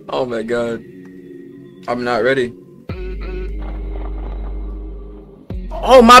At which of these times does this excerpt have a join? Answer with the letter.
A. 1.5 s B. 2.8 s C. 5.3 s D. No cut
D